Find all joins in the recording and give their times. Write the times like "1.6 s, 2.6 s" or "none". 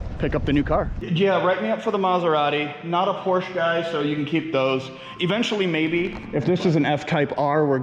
1.0 s, 6.2 s